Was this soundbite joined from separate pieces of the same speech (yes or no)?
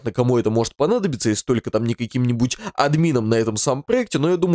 no